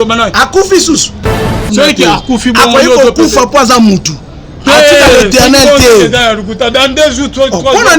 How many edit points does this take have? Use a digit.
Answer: 1